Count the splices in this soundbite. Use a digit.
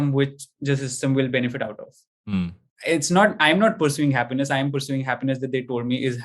1